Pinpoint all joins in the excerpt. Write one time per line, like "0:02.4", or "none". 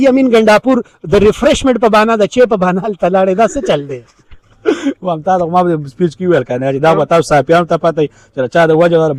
none